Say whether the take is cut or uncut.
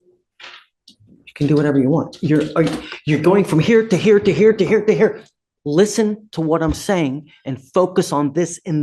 uncut